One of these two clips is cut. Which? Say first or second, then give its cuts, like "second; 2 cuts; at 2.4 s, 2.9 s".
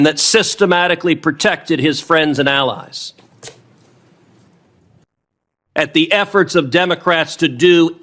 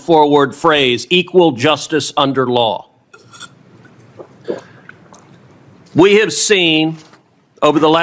first; 1 cut; at 5.1 s